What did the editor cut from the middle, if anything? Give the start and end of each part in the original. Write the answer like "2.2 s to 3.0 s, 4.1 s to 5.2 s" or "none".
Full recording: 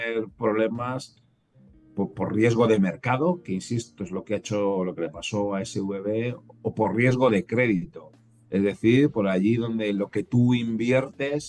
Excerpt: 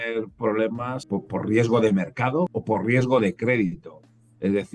1.0 s to 1.9 s, 3.4 s to 6.6 s